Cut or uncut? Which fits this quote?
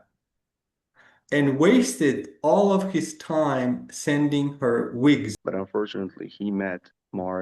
cut